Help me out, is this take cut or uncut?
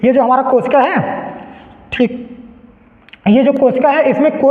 uncut